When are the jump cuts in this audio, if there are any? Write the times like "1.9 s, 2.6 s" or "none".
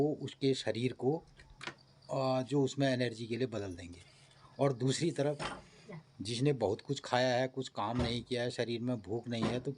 none